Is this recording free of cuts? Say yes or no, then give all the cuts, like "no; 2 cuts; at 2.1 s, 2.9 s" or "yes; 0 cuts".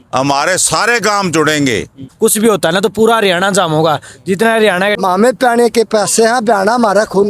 no; 2 cuts; at 2.1 s, 5.0 s